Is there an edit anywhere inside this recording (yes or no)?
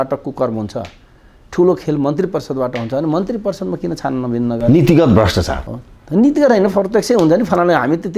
no